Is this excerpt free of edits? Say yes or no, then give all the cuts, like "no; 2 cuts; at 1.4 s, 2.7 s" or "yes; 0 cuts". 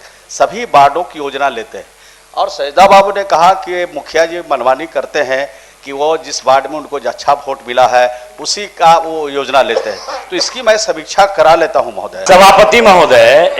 no; 1 cut; at 12.2 s